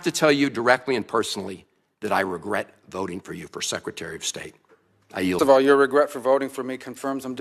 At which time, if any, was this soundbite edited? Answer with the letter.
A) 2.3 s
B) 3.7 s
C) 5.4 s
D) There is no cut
C